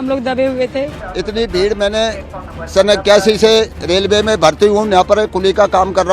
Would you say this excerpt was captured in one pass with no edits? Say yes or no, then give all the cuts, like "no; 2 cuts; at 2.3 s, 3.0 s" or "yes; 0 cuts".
no; 1 cut; at 1.1 s